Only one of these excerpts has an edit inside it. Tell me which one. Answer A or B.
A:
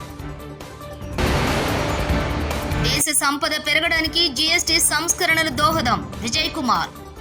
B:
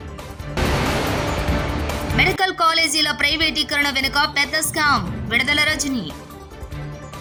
A